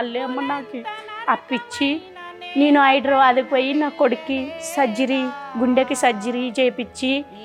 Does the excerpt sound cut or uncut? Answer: uncut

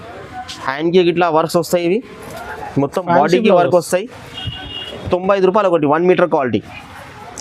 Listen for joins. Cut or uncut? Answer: uncut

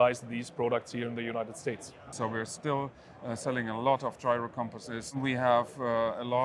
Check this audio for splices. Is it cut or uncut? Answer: cut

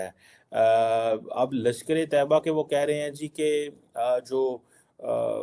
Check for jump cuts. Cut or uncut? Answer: uncut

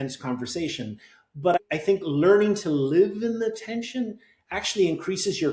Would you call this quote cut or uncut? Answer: cut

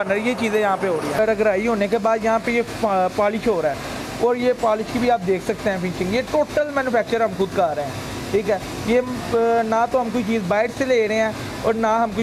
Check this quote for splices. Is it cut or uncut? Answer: uncut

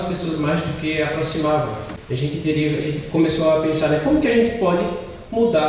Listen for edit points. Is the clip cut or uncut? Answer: cut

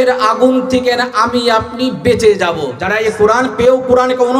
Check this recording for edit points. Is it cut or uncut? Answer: cut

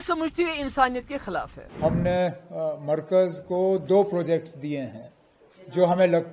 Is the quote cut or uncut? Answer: cut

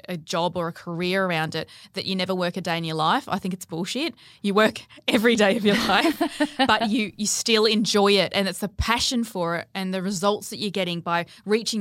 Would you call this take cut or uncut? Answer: uncut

